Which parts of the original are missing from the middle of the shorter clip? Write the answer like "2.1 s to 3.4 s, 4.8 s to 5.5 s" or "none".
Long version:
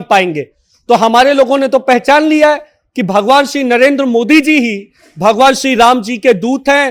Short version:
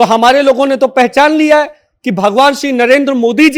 none